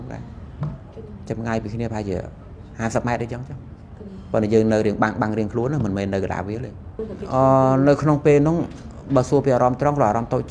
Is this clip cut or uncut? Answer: cut